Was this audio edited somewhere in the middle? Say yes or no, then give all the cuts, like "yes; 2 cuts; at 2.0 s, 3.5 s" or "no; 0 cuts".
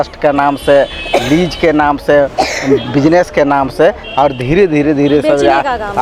no; 0 cuts